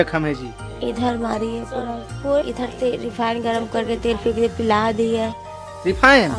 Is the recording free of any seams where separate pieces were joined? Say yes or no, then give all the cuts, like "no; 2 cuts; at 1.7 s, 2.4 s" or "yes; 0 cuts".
no; 1 cut; at 2.4 s